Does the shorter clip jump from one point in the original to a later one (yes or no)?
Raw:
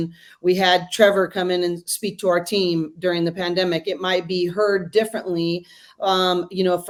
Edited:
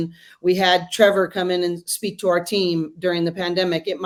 no